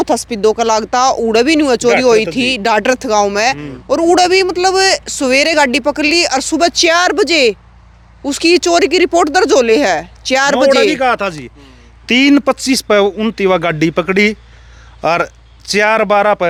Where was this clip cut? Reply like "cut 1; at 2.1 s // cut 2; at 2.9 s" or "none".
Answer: none